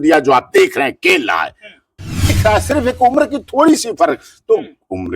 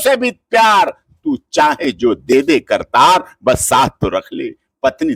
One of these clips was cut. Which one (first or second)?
first